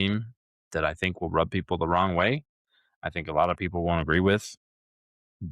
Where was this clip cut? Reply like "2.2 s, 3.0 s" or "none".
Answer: none